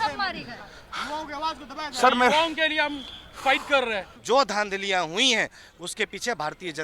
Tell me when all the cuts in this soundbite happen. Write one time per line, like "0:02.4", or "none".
0:04.1

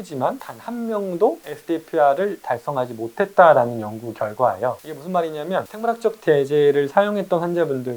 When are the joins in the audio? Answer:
none

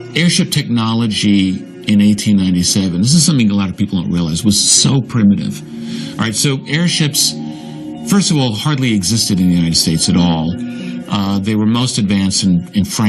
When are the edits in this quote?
none

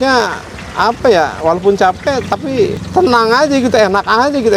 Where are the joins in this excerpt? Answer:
0:02.8

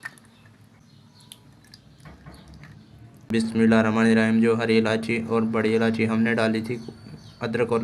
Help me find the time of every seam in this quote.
0:00.8
0:03.3

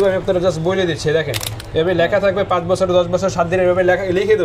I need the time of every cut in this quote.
0:01.6

